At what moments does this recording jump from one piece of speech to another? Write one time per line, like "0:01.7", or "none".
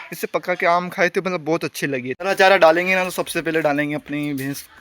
0:02.1